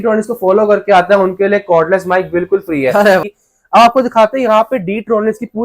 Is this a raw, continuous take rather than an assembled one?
no; 1 cut; at 3.2 s

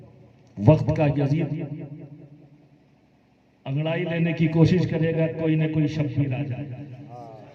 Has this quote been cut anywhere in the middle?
no; 0 cuts

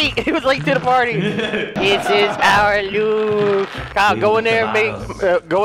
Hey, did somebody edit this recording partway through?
yes; 2 cuts; at 1.7 s, 3.8 s

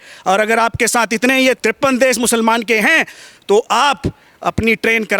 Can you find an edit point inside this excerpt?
yes; 1 cut; at 1.6 s

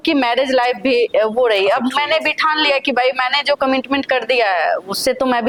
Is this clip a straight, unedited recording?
yes; 0 cuts

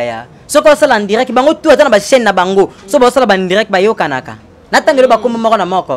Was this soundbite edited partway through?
no; 0 cuts

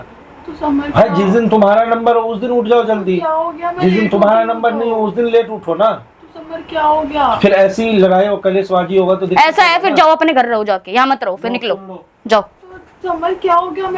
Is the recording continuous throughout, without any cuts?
yes; 0 cuts

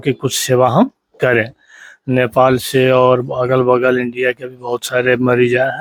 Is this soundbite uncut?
yes; 0 cuts

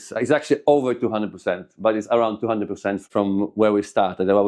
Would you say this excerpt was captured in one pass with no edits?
no; 1 cut; at 3.0 s

